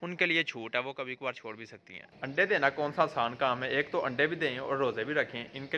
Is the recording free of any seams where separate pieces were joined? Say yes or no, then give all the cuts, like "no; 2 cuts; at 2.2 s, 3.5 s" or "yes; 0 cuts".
yes; 0 cuts